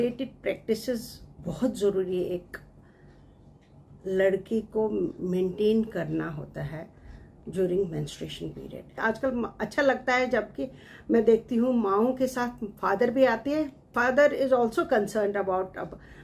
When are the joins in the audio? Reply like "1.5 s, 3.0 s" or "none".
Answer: 9.0 s, 13.9 s